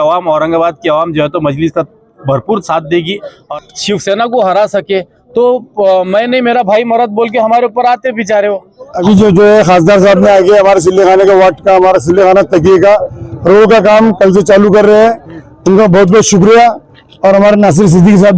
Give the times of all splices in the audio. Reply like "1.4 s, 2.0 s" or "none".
3.5 s, 8.9 s

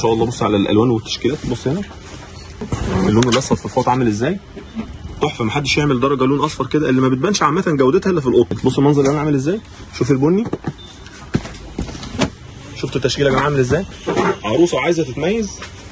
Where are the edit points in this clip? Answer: 2.7 s, 8.6 s, 13.9 s

